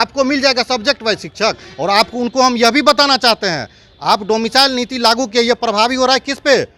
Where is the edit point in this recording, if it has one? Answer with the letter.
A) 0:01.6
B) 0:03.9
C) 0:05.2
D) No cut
D